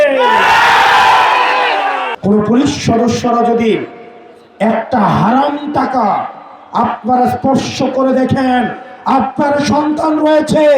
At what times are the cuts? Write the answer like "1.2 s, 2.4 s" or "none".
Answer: 2.1 s